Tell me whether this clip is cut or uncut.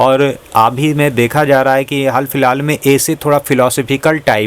uncut